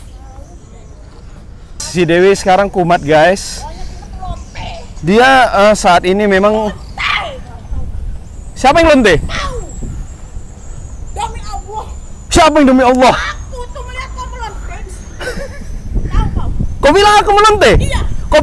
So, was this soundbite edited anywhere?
yes; 1 cut; at 1.8 s

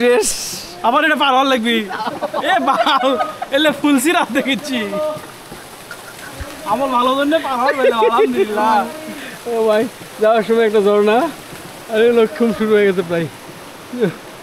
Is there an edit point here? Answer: no; 0 cuts

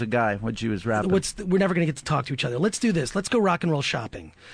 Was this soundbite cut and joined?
yes; 1 cut; at 1.0 s

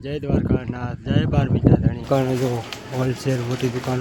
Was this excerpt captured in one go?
no; 1 cut; at 2.1 s

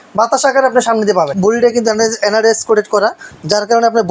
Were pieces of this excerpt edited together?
yes; 1 cut; at 1.3 s

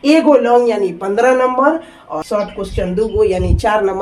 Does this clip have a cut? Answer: yes; 1 cut; at 2.2 s

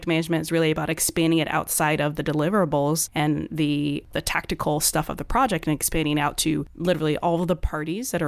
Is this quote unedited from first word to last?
no; 3 cuts; at 3.1 s, 4.1 s, 6.7 s

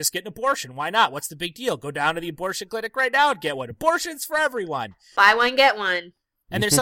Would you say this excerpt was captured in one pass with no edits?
yes; 0 cuts

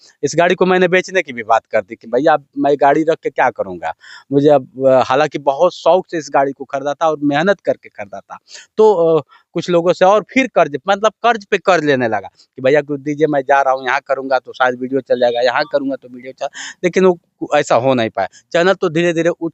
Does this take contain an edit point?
no; 0 cuts

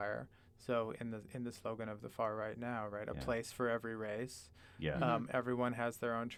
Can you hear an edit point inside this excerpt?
no; 0 cuts

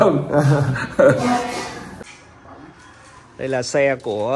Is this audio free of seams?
no; 1 cut; at 2.0 s

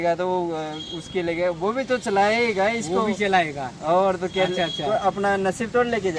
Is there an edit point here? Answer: no; 0 cuts

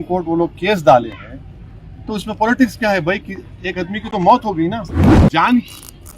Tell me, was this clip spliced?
yes; 1 cut; at 5.2 s

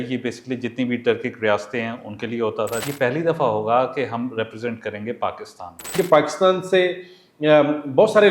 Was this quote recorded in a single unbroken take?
no; 2 cuts; at 2.8 s, 5.9 s

